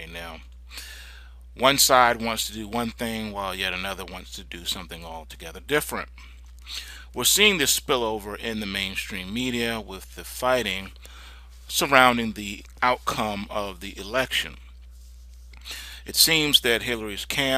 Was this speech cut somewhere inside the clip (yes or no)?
yes